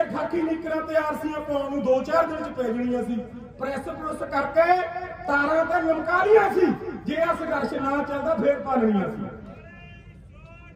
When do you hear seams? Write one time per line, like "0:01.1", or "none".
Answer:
none